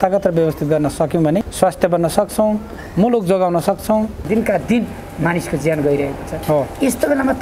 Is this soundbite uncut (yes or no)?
no